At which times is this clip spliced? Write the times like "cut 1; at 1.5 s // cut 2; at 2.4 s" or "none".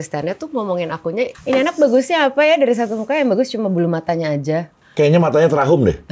cut 1; at 1.4 s // cut 2; at 4.8 s

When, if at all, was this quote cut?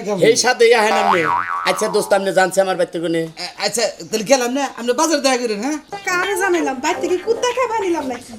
cut 1; at 6.0 s

